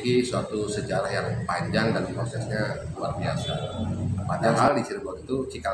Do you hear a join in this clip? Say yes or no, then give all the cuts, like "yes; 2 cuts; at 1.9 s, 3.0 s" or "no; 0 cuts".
yes; 1 cut; at 4.6 s